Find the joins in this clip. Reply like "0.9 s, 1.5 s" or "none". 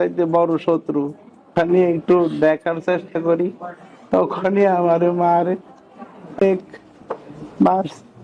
1.5 s